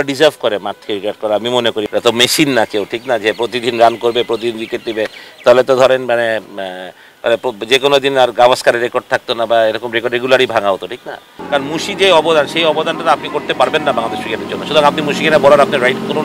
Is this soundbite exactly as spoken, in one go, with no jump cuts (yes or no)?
no